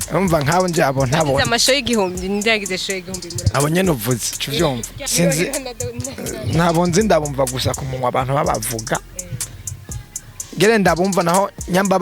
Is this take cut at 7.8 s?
no; 1 cut; at 4.9 s

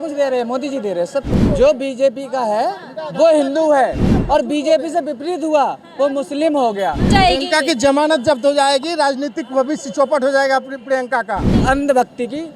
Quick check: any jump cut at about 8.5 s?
no; 3 cuts; at 1.4 s, 7.1 s, 11.5 s

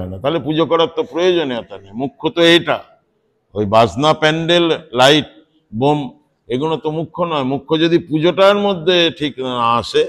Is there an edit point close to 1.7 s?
no; 0 cuts

